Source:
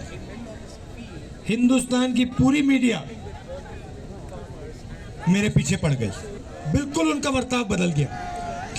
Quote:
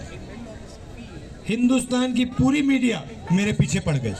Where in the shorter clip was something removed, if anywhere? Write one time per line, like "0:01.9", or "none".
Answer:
0:03.1